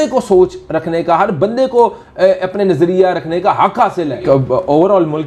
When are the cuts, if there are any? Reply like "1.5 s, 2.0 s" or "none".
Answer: 4.2 s